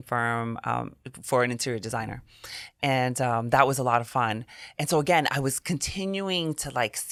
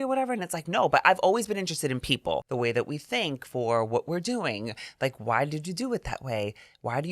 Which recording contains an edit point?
second; 1 cut; at 2.4 s

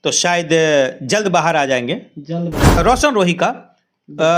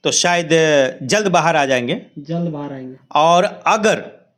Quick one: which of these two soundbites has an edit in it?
first; 1 cut; at 2.8 s

